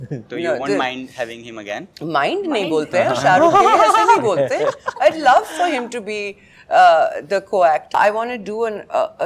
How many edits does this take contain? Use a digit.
1